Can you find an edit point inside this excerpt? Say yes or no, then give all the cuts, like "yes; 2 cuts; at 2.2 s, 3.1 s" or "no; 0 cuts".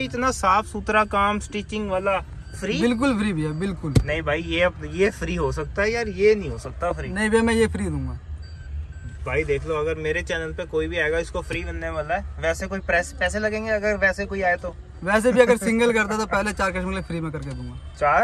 no; 0 cuts